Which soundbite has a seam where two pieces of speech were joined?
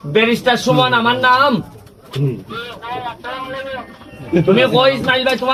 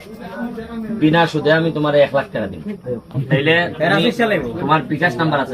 second; 1 cut; at 3.1 s

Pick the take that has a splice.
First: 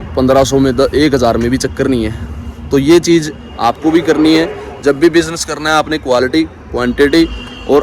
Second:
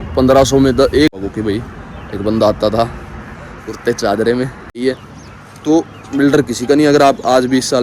second; 2 cuts; at 1.1 s, 4.8 s

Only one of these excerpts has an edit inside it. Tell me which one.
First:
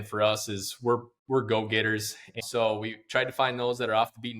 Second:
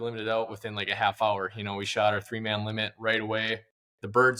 first; 1 cut; at 2.4 s

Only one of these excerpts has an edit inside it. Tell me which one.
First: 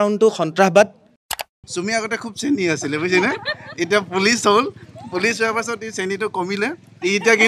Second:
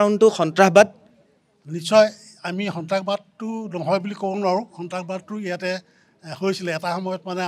first; 1 cut; at 1.6 s

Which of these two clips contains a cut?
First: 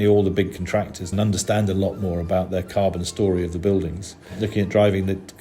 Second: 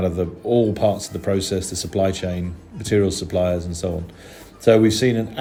first; 2 cuts; at 1.1 s, 4.3 s

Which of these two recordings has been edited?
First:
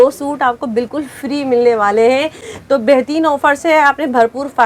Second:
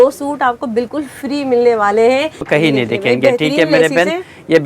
second; 1 cut; at 2.5 s

